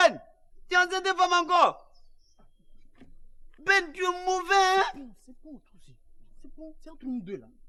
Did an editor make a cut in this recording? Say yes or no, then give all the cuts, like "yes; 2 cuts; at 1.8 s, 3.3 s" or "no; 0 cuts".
no; 0 cuts